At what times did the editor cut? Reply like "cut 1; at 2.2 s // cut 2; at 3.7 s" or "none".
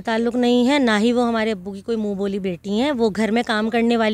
none